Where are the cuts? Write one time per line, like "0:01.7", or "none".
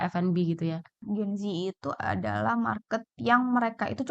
0:01.0